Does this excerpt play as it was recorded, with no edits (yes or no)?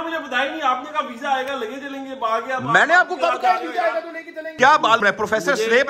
no